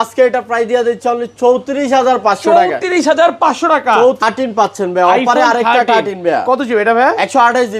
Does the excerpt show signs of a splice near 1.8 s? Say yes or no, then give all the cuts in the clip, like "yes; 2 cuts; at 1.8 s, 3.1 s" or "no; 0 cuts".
no; 1 cut; at 4.2 s